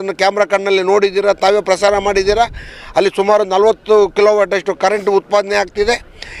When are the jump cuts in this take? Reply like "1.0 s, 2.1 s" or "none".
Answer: none